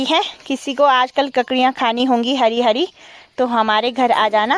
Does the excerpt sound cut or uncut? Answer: uncut